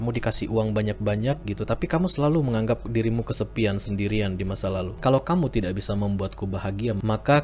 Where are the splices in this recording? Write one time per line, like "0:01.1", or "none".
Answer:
0:04.9